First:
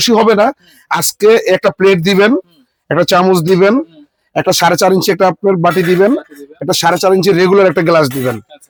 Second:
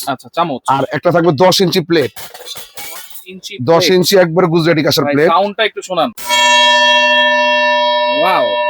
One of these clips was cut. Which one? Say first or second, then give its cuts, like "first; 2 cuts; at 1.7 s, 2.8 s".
second; 1 cut; at 6.2 s